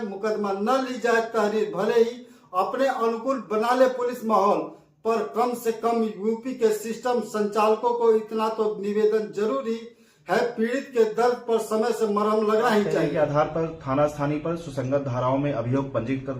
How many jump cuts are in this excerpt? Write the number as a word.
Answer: one